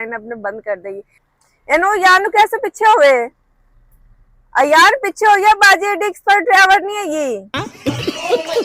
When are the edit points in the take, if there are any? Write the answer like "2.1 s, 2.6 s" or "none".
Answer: 1.2 s